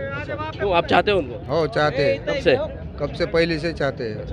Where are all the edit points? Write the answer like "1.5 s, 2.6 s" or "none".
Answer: none